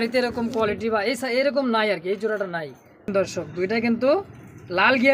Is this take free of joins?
no; 1 cut; at 3.1 s

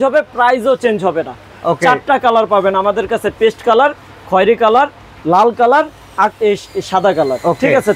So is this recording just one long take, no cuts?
yes; 0 cuts

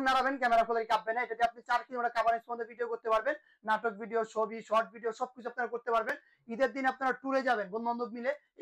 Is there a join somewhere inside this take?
no; 0 cuts

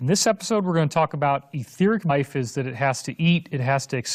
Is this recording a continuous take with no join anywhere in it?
yes; 0 cuts

